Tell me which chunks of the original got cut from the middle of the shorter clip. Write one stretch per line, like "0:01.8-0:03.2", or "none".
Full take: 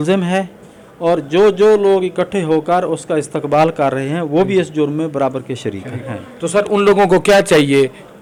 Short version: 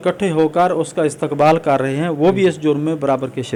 none